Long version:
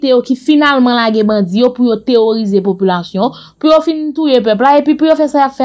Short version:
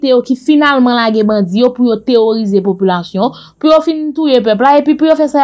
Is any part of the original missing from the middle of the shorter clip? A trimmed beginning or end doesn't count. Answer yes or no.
no